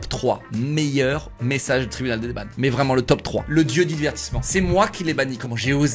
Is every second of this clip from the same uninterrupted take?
yes; 0 cuts

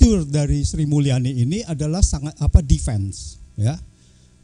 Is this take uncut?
yes; 0 cuts

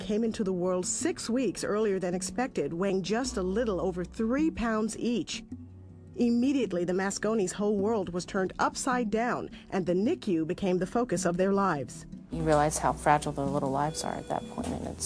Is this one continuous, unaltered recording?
yes; 0 cuts

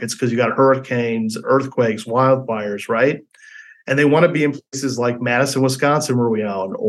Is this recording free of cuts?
yes; 0 cuts

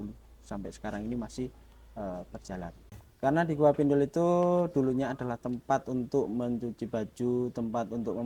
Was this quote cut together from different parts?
yes; 1 cut; at 3.0 s

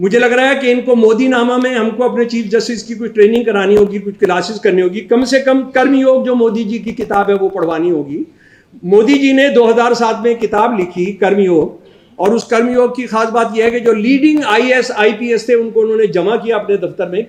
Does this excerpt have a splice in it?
no; 0 cuts

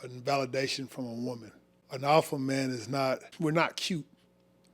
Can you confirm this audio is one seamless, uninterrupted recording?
no; 2 cuts; at 1.8 s, 3.3 s

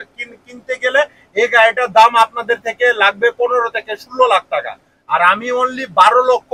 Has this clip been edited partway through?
no; 0 cuts

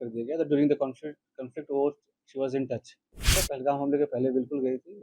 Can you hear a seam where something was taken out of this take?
yes; 1 cut; at 3.4 s

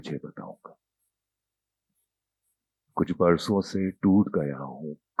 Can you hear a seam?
no; 0 cuts

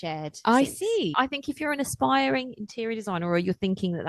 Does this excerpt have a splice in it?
yes; 1 cut; at 1.1 s

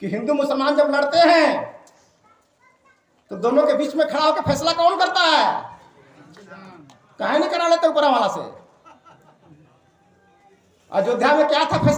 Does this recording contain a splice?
no; 0 cuts

